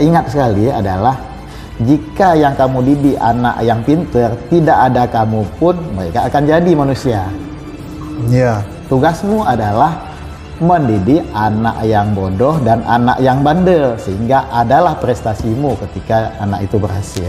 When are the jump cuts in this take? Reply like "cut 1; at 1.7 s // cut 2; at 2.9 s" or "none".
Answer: none